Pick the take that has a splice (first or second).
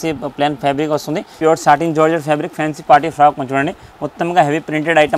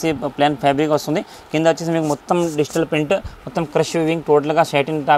first